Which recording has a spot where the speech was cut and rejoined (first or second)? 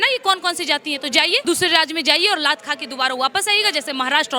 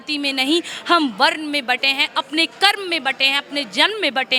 first